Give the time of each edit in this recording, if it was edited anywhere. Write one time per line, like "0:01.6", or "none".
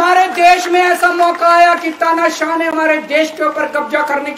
none